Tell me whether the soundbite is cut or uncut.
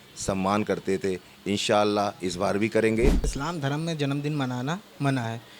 cut